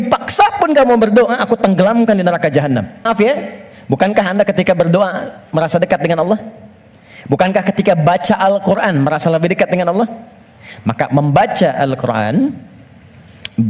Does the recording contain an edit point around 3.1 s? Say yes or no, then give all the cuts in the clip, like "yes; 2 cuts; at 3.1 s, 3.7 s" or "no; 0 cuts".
yes; 1 cut; at 3.1 s